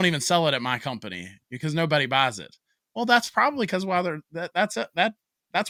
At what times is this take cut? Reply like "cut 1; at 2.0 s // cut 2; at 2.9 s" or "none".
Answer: none

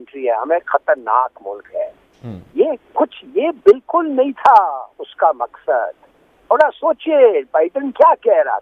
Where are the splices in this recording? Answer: none

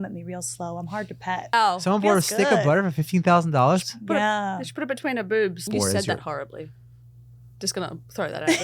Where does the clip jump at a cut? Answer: cut 1; at 1.5 s // cut 2; at 5.7 s

